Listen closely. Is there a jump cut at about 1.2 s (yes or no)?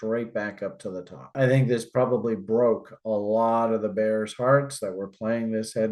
no